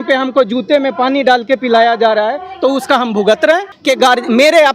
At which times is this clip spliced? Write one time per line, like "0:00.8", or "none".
0:03.7